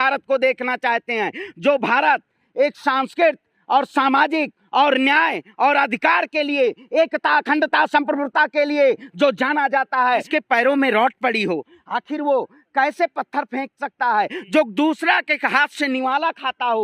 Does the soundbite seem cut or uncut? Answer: cut